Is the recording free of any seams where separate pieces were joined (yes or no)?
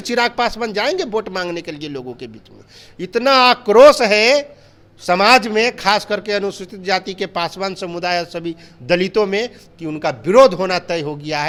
yes